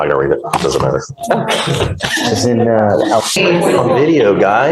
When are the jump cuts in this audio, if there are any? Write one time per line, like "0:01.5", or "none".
0:03.4